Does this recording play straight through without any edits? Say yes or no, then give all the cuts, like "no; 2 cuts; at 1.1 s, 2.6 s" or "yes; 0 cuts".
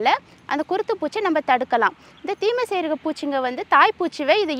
yes; 0 cuts